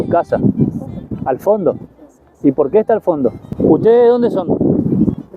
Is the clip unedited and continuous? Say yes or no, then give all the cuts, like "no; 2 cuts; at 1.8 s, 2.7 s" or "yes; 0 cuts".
no; 1 cut; at 3.5 s